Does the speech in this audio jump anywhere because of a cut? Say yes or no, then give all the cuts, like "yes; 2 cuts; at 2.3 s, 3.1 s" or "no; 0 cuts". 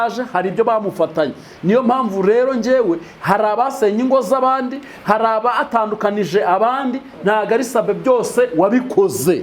no; 0 cuts